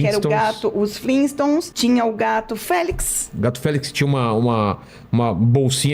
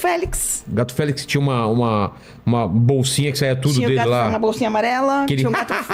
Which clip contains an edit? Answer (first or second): first